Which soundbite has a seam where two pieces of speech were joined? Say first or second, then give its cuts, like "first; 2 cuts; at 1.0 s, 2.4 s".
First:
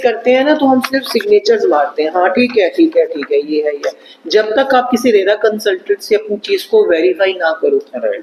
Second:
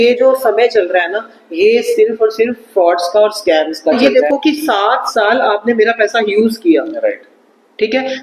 second; 1 cut; at 4.0 s